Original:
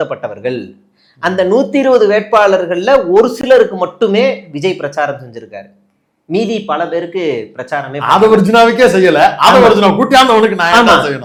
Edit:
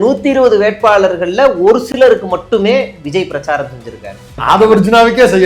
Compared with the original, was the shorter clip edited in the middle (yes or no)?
yes